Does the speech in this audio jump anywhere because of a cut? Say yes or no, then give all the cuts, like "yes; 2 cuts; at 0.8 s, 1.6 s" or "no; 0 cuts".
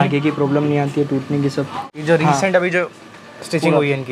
yes; 1 cut; at 1.9 s